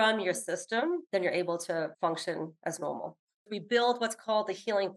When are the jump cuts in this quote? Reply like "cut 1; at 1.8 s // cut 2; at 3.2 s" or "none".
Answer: cut 1; at 1.0 s // cut 2; at 2.1 s // cut 3; at 3.5 s